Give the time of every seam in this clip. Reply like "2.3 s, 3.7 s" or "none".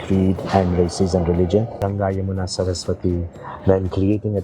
1.7 s